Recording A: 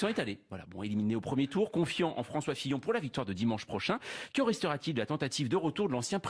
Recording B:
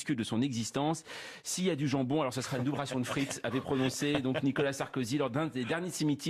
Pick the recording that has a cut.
A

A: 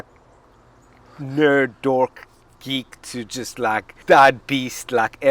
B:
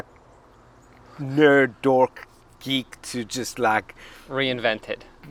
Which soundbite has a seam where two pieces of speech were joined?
A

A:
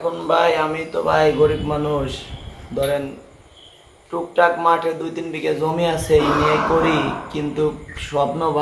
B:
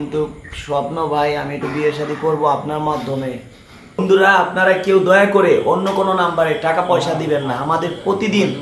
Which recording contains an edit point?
B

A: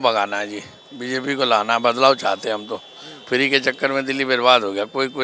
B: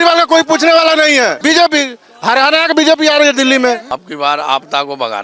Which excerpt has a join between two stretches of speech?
B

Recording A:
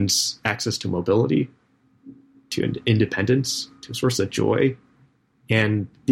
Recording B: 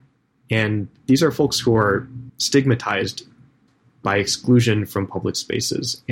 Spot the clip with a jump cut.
B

